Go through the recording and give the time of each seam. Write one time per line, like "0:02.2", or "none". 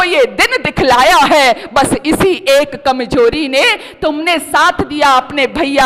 none